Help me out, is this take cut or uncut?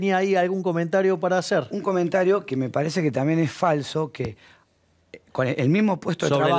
uncut